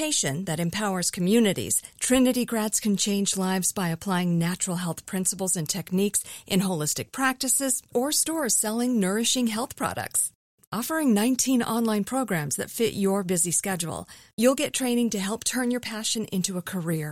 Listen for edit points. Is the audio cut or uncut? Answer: uncut